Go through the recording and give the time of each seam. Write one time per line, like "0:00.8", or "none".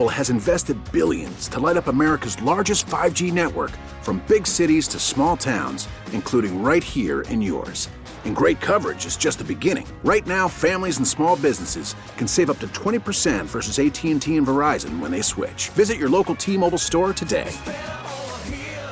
none

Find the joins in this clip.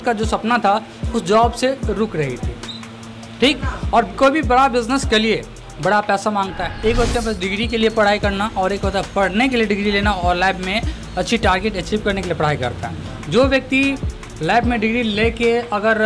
0:06.6

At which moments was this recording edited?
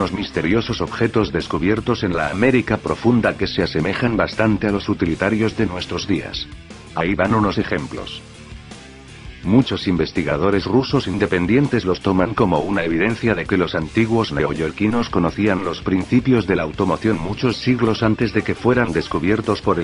0:02.7

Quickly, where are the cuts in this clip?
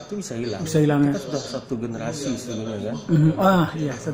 none

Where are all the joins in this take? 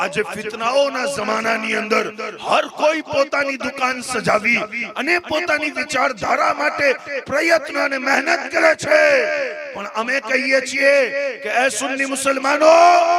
none

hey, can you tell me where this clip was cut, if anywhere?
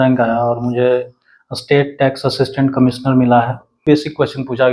0:03.8

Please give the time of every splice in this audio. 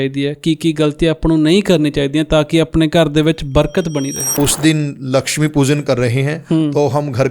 0:04.3

